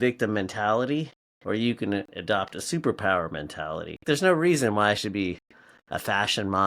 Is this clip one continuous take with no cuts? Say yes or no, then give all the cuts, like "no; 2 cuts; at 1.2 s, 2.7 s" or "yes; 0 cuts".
no; 1 cut; at 4.0 s